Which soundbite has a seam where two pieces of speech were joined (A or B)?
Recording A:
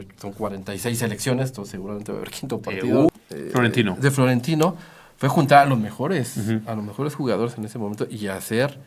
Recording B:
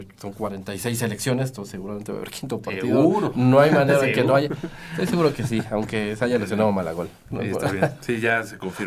A